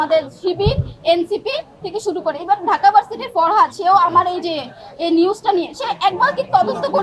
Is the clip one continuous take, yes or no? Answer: yes